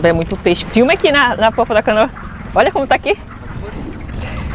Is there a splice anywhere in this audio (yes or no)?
no